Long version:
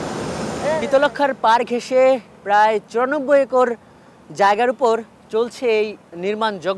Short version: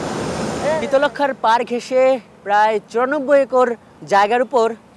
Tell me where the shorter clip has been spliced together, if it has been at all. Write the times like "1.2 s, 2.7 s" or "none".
3.9 s